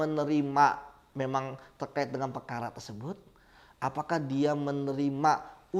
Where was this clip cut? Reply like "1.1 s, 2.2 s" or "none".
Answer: none